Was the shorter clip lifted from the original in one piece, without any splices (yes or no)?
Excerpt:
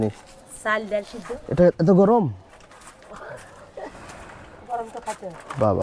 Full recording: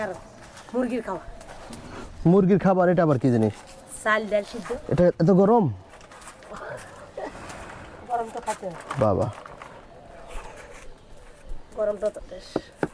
yes